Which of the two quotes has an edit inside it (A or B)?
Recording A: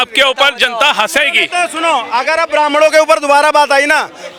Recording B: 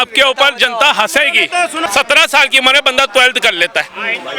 B